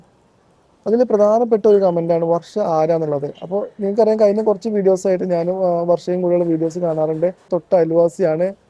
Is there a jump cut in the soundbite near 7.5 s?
yes; 1 cut; at 7.5 s

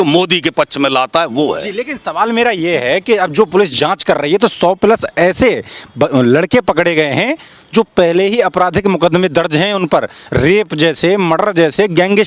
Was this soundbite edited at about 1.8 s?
no; 0 cuts

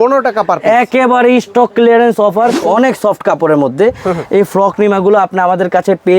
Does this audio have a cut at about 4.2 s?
no; 1 cut; at 2.6 s

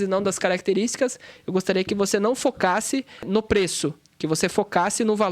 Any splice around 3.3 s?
yes; 1 cut; at 3.3 s

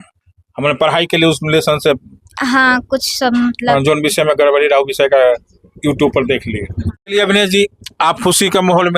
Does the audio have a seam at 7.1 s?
yes; 1 cut; at 7.1 s

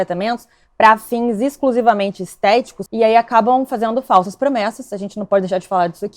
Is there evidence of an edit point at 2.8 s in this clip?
yes; 1 cut; at 2.8 s

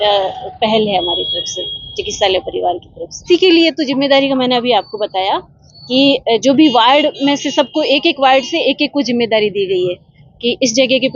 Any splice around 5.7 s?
no; 1 cut; at 3.2 s

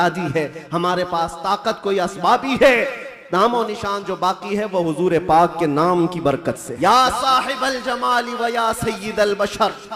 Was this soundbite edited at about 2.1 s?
no; 1 cut; at 6.7 s

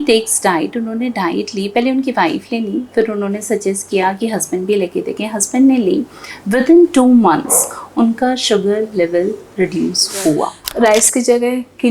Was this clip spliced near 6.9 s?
no; 1 cut; at 10.6 s

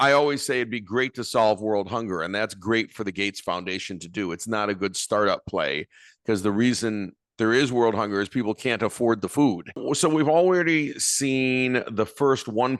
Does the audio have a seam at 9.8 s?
yes; 1 cut; at 9.8 s

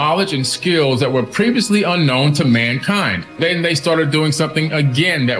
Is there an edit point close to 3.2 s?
yes; 1 cut; at 3.2 s

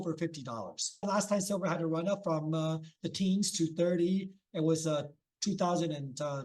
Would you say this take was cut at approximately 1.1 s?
yes; 1 cut; at 1.1 s

